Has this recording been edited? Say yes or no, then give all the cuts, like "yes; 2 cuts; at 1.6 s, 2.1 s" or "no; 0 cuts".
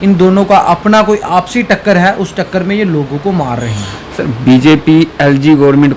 no; 0 cuts